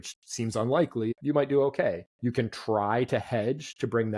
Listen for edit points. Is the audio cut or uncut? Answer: cut